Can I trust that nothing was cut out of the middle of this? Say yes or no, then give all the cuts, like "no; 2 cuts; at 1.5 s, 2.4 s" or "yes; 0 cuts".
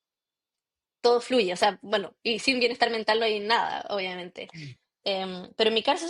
yes; 0 cuts